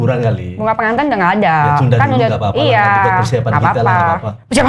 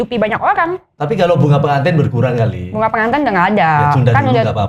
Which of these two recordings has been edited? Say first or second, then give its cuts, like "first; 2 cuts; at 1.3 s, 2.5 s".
second; 1 cut; at 1.0 s